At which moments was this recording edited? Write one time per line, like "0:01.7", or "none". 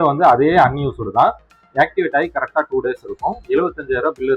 none